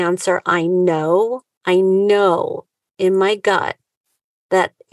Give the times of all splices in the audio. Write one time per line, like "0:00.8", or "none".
0:01.5